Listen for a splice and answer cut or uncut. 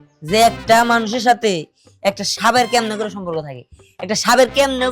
uncut